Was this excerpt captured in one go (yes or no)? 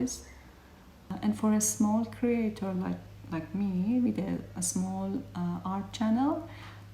no